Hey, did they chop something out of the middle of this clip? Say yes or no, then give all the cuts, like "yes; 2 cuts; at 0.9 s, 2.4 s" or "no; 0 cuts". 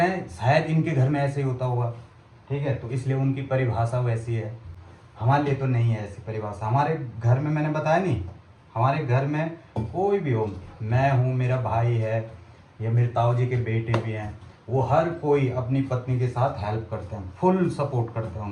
no; 0 cuts